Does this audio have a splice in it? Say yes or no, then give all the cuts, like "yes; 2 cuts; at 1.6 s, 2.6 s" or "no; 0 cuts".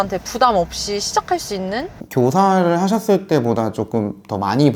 yes; 1 cut; at 1.9 s